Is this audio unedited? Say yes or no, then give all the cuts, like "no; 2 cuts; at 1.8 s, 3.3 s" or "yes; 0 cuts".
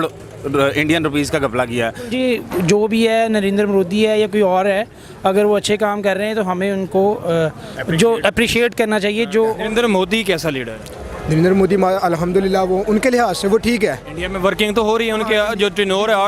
no; 2 cuts; at 2.1 s, 9.6 s